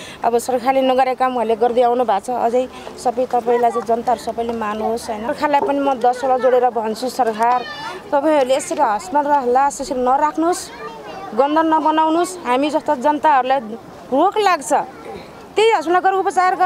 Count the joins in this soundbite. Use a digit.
1